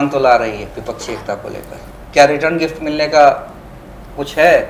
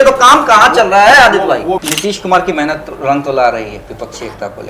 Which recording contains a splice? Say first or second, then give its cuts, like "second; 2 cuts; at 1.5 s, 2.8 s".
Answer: second; 1 cut; at 1.8 s